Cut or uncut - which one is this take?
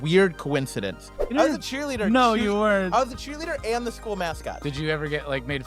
cut